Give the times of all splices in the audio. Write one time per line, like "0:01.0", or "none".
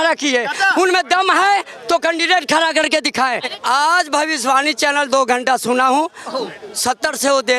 0:03.5